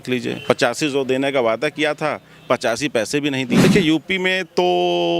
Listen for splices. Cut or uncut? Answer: cut